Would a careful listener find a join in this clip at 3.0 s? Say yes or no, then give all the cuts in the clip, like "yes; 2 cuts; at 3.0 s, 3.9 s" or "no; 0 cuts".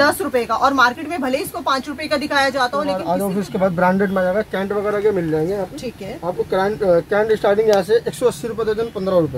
yes; 1 cut; at 3.0 s